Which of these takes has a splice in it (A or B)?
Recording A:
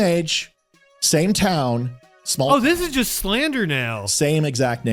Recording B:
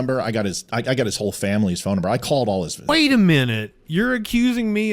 B